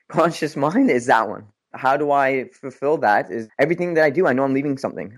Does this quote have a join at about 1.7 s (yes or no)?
yes